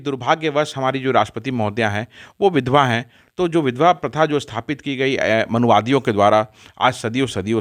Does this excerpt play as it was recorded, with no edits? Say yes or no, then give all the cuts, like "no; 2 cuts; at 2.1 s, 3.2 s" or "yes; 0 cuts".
yes; 0 cuts